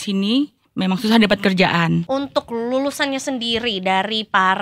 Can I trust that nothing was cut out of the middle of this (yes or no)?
no